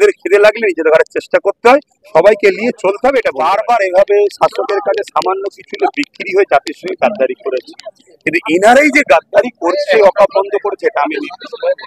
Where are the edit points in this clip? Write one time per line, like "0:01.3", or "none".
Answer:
0:03.3